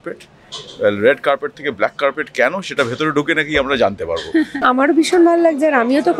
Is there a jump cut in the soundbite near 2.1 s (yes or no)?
no